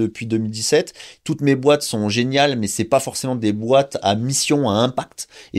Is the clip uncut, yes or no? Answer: yes